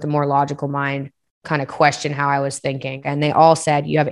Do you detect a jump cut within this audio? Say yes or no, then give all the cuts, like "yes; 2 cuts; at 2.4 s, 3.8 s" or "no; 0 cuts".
yes; 1 cut; at 3.0 s